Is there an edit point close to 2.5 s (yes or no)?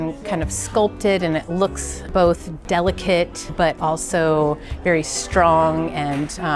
yes